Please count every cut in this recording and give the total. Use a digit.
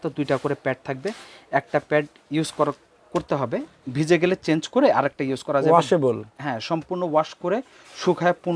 1